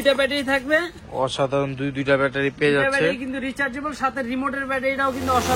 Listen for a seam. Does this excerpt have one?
no; 0 cuts

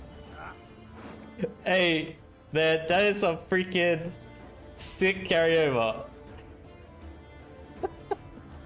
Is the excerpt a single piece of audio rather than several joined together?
yes; 0 cuts

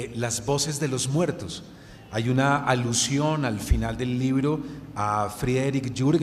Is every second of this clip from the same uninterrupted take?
no; 1 cut; at 3.8 s

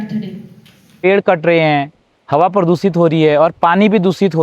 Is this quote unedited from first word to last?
no; 1 cut; at 0.9 s

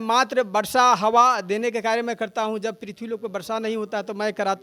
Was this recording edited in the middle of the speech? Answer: no; 0 cuts

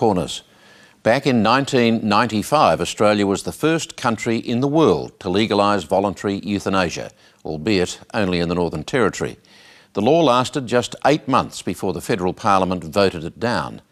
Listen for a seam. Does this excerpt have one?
no; 0 cuts

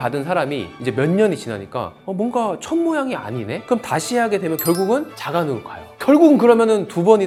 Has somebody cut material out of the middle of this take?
no; 0 cuts

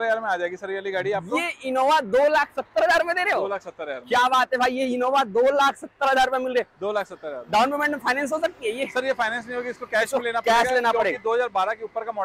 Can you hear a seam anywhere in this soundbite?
no; 0 cuts

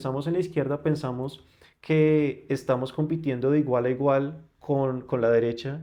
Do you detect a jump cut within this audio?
no; 0 cuts

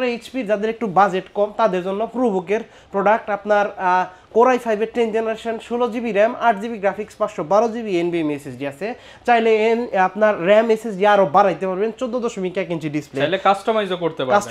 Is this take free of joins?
yes; 0 cuts

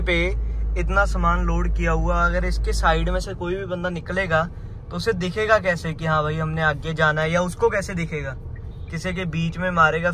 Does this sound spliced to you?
no; 0 cuts

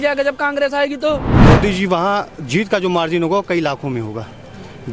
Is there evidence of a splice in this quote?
yes; 1 cut; at 1.3 s

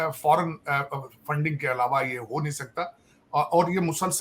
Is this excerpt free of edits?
yes; 0 cuts

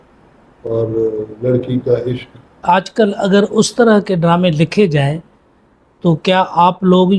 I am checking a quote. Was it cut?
yes; 1 cut; at 2.6 s

